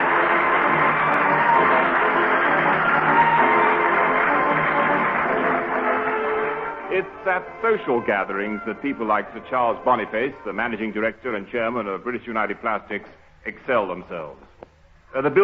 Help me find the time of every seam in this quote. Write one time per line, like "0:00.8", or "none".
0:13.4